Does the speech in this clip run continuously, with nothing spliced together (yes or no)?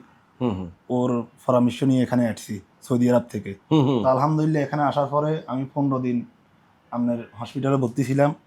yes